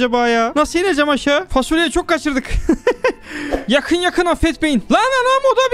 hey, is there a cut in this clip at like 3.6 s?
yes; 1 cut; at 3.6 s

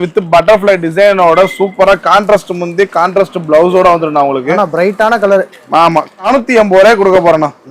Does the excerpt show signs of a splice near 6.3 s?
yes; 1 cut; at 6.3 s

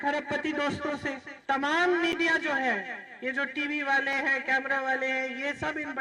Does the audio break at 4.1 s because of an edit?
no; 1 cut; at 1.3 s

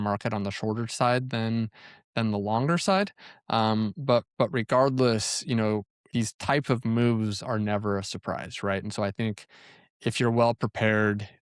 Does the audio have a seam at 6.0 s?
yes; 1 cut; at 6.0 s

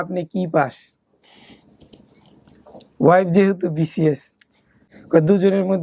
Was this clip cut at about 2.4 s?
no; 1 cut; at 4.9 s

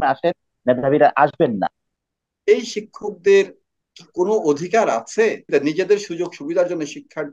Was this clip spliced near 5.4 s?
yes; 2 cuts; at 1.9 s, 5.4 s

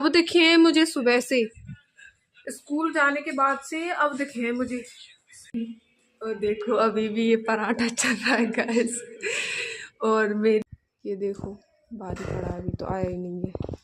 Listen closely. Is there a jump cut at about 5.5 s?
yes; 2 cuts; at 5.5 s, 10.6 s

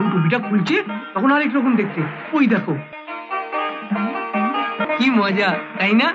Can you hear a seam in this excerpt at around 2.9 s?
yes; 2 cuts; at 2.9 s, 4.8 s

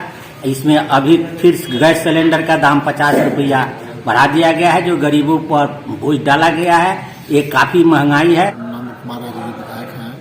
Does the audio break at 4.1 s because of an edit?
no; 1 cut; at 8.6 s

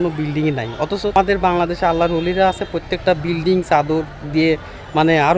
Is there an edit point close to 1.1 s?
yes; 1 cut; at 1.1 s

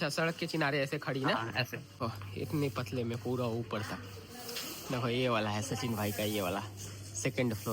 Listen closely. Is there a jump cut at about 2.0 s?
yes; 1 cut; at 2.0 s

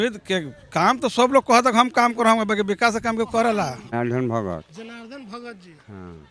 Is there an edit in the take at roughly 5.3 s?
no; 1 cut; at 3.9 s

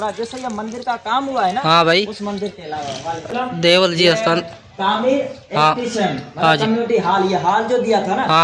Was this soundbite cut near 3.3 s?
yes; 1 cut; at 3.3 s

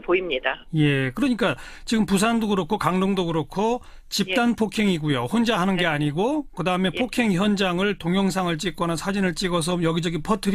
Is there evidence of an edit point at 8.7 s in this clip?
no; 0 cuts

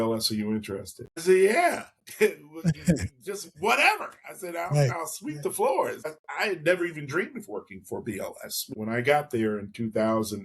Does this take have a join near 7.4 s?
no; 1 cut; at 8.7 s

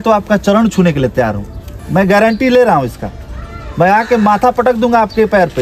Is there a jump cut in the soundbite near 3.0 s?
no; 0 cuts

